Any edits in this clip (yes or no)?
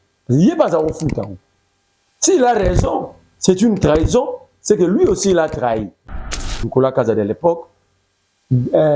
yes